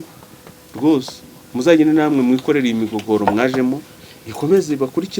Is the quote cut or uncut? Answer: uncut